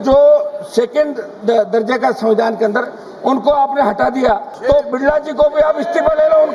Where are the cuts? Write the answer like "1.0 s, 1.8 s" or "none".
4.5 s

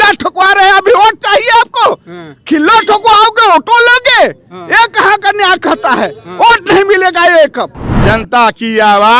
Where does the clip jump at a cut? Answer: 7.8 s

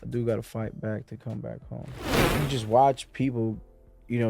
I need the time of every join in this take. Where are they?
2.1 s

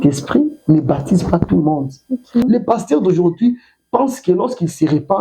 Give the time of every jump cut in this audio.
2.4 s

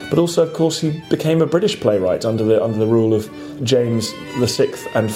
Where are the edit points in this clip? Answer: 3.6 s, 4.2 s

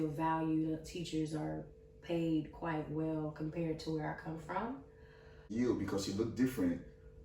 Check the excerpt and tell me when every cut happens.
5.5 s

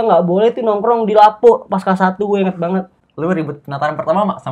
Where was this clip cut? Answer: 3.0 s

